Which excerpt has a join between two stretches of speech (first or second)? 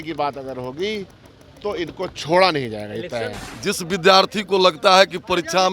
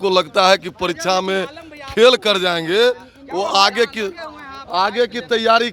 first